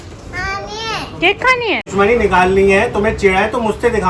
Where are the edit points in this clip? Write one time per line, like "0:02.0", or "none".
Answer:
0:01.9